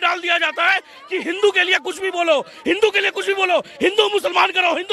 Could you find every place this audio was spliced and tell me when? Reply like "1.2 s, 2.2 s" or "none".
none